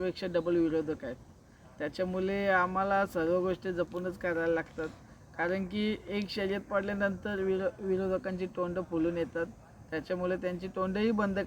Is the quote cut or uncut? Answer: uncut